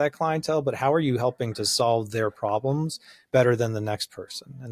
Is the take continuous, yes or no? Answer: yes